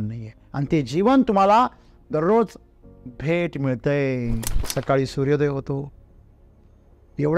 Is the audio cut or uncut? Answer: cut